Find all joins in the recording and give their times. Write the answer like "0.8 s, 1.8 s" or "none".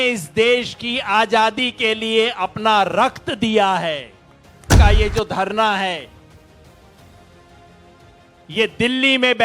4.7 s